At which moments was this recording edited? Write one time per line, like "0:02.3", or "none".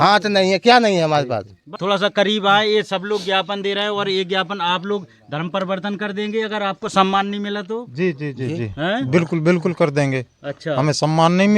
0:01.8